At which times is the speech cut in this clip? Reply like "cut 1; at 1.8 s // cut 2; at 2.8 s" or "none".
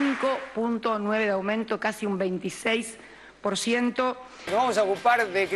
cut 1; at 4.3 s